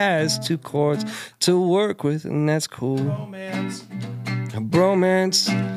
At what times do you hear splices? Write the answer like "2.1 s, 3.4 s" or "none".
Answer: 3.3 s